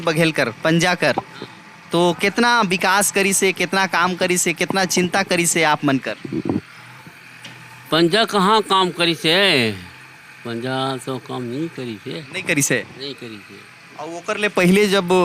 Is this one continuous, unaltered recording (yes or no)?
yes